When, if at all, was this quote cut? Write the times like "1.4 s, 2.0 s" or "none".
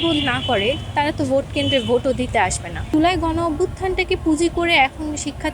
2.9 s